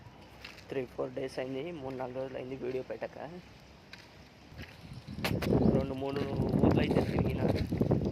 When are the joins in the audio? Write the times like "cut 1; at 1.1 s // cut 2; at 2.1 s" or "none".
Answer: cut 1; at 4.5 s